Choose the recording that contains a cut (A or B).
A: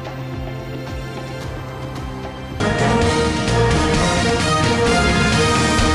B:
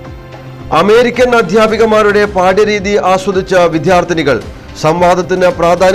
A